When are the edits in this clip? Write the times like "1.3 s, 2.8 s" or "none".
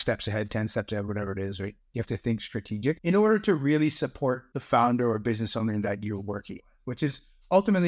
3.0 s, 4.5 s